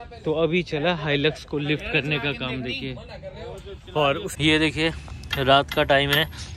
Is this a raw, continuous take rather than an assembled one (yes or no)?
no